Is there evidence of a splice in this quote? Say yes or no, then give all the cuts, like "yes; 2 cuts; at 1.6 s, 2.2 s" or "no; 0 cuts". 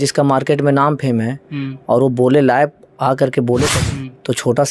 yes; 1 cut; at 3.8 s